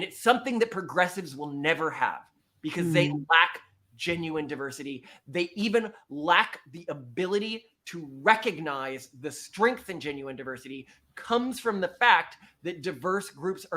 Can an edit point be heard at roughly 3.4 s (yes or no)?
no